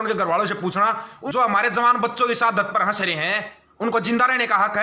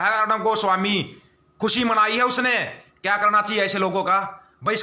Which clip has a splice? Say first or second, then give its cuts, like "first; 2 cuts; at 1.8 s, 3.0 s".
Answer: first; 1 cut; at 1.1 s